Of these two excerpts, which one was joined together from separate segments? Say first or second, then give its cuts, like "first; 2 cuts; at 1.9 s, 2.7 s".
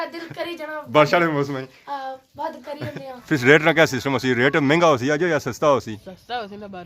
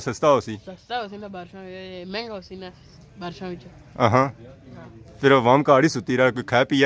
first; 1 cut; at 3.2 s